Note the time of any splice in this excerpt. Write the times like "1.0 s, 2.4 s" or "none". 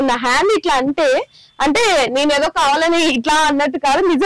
none